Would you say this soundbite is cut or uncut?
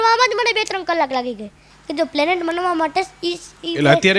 cut